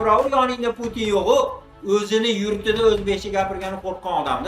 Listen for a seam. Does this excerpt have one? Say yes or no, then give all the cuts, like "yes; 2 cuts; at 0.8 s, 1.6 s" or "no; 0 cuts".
yes; 1 cut; at 1.7 s